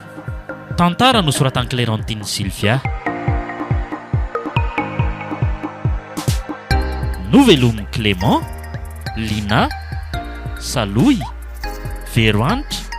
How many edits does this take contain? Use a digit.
1